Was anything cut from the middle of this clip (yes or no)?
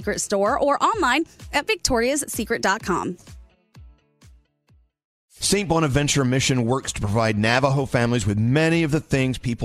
yes